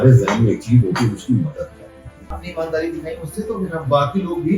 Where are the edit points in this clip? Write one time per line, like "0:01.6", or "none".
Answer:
0:02.4

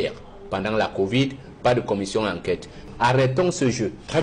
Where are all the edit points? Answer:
0:02.8

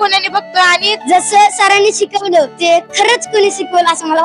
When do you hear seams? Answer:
0:00.9
0:02.5

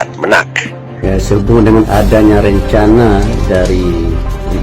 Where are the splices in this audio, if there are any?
0:01.0

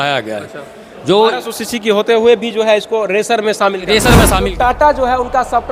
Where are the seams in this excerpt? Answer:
0:04.5

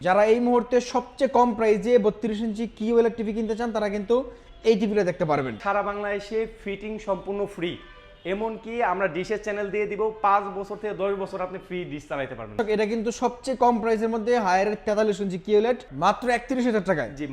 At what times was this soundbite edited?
0:05.6
0:12.5
0:15.9

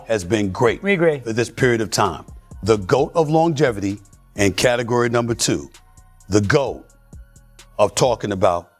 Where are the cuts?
none

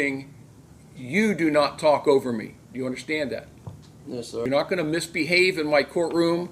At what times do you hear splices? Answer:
0:04.4

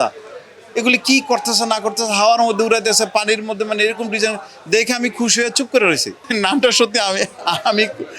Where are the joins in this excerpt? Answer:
0:06.2

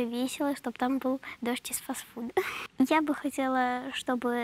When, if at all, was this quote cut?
0:02.6

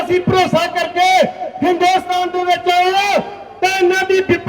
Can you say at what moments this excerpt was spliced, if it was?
none

